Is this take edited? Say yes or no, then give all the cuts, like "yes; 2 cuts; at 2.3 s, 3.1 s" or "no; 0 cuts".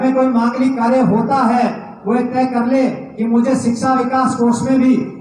no; 0 cuts